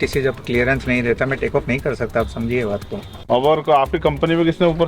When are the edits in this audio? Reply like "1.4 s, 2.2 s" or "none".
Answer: 3.1 s